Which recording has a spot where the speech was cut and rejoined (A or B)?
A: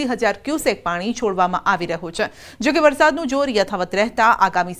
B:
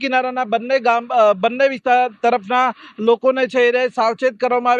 B